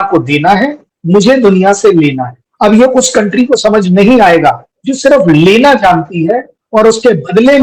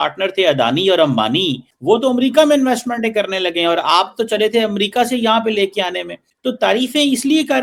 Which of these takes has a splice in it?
first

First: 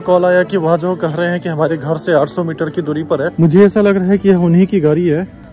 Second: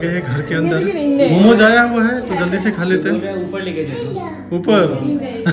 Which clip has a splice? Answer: first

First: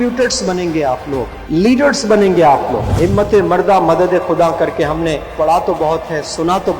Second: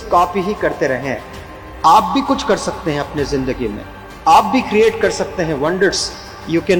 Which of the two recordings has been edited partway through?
first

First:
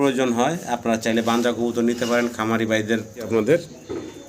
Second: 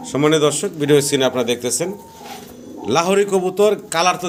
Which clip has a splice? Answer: first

